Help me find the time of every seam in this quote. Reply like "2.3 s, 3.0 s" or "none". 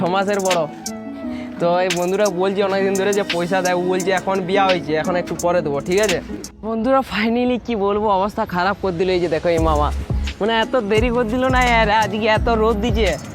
6.5 s